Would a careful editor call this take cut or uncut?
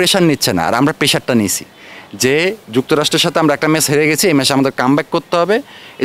uncut